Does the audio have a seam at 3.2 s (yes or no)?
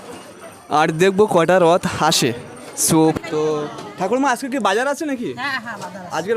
yes